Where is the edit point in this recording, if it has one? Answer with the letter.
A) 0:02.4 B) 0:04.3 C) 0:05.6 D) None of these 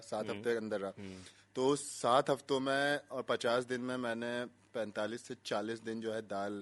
D